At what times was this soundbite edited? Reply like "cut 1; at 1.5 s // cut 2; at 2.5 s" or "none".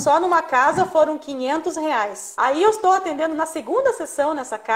cut 1; at 2.2 s